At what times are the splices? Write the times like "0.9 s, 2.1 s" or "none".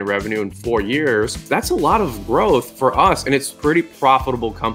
1.4 s, 3.3 s